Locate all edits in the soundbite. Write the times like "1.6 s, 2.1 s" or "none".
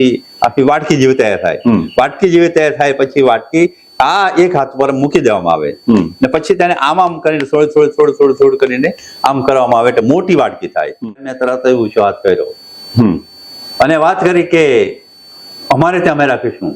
11.0 s